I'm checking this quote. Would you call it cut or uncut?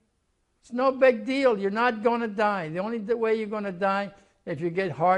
uncut